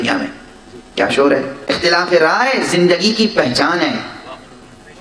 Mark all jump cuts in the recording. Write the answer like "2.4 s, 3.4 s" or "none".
1.6 s